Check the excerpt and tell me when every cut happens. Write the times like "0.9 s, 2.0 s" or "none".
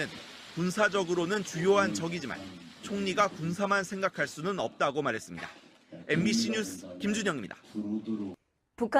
4.5 s